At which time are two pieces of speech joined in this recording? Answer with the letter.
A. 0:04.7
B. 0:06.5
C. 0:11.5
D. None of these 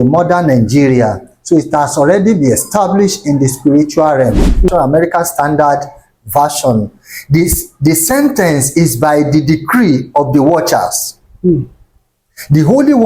A